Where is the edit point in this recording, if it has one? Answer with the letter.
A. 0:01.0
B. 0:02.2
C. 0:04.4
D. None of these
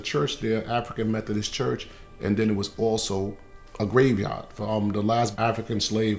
C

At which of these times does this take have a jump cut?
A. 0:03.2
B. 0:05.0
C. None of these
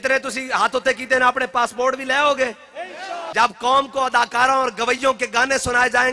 A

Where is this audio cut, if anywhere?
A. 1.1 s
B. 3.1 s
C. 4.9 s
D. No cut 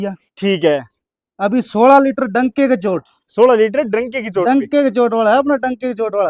D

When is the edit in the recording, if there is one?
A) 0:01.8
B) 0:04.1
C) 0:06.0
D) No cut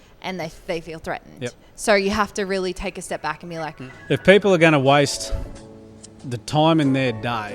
B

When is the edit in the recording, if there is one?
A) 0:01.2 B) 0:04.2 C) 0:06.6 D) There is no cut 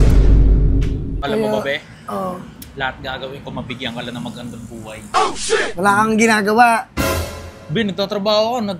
A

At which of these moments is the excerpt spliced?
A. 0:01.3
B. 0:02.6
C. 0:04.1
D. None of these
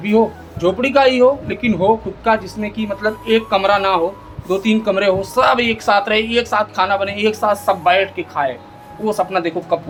D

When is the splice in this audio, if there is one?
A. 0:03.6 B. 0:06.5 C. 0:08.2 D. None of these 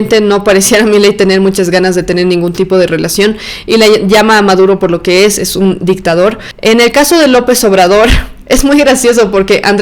B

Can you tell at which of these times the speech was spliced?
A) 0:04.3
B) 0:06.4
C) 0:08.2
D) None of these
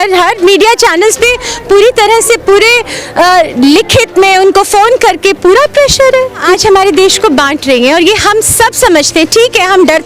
B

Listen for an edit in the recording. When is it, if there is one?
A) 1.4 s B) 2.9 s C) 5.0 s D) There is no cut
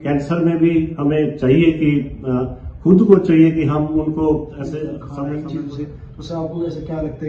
C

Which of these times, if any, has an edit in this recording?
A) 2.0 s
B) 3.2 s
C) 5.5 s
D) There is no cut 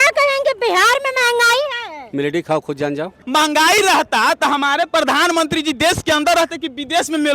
B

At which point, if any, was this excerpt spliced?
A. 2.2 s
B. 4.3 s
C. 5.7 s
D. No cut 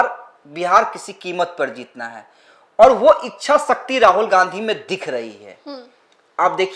D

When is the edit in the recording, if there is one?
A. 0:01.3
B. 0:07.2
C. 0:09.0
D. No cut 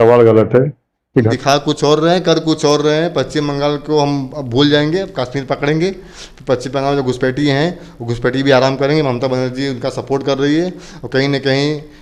A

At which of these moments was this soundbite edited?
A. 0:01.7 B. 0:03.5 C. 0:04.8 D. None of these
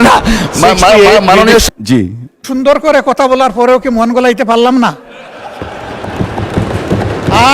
A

